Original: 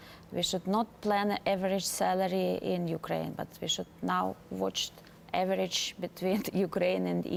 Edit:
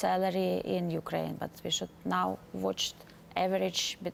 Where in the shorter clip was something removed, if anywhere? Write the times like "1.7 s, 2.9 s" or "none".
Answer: none